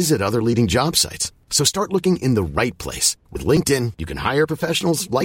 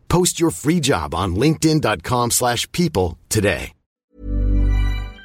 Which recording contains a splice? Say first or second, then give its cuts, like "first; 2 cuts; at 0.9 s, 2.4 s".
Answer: second; 1 cut; at 3.9 s